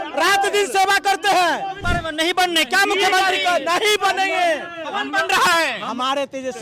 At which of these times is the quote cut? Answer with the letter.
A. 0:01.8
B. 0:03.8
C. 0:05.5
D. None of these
A